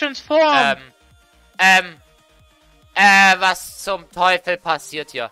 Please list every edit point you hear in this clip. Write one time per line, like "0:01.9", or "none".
none